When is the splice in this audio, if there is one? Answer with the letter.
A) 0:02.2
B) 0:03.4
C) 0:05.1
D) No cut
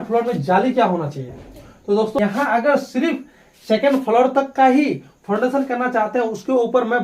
A